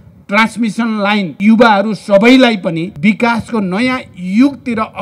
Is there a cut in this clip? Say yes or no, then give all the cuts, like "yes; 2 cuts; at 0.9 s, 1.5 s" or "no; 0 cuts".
yes; 2 cuts; at 1.3 s, 2.9 s